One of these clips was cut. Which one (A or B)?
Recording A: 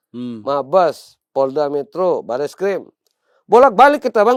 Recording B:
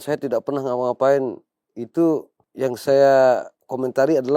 B